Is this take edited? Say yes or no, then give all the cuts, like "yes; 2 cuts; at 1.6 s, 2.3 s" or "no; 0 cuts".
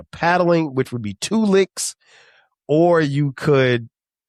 no; 0 cuts